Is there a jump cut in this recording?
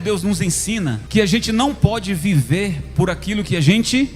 yes; 1 cut; at 1.0 s

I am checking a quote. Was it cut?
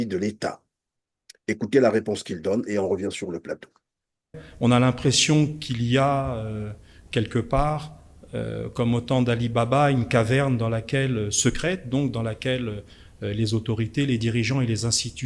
yes; 1 cut; at 4.3 s

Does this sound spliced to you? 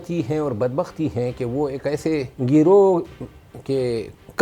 yes; 1 cut; at 2.3 s

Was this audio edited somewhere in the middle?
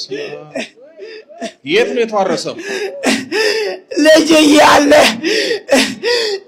no; 0 cuts

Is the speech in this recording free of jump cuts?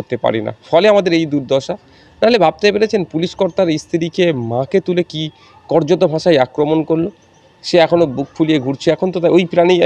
yes; 0 cuts

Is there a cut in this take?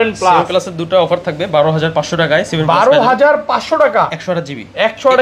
no; 0 cuts

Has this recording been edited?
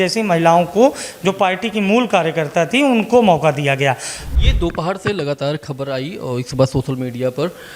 yes; 1 cut; at 4.2 s

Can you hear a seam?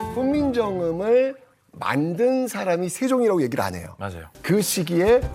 yes; 1 cut; at 4.3 s

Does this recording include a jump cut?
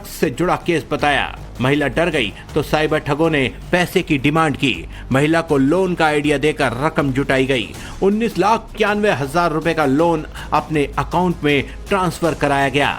yes; 1 cut; at 9.0 s

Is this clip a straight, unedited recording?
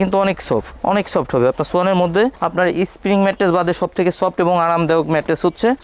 yes; 0 cuts

